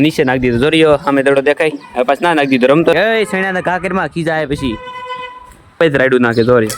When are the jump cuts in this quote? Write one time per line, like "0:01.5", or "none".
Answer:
0:02.9
0:05.8